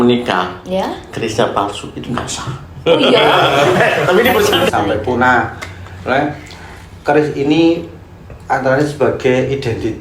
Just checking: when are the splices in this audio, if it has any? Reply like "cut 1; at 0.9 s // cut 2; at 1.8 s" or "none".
cut 1; at 4.6 s